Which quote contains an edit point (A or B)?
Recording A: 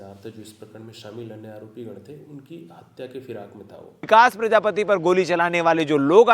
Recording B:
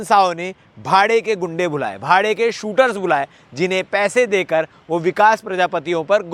A